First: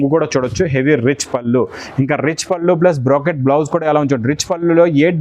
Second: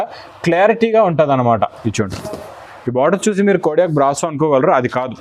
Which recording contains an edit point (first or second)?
second